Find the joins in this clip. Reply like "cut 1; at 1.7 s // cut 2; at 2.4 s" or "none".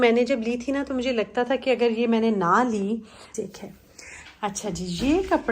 cut 1; at 3.2 s